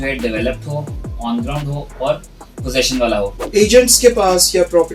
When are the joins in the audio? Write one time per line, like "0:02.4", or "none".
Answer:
0:03.5